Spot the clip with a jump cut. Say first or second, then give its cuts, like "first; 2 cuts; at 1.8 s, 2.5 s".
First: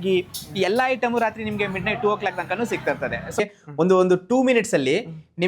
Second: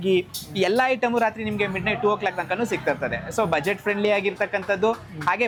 first; 1 cut; at 3.4 s